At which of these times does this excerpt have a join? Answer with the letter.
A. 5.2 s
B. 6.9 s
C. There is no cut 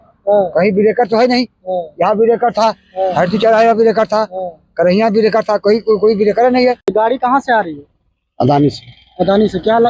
B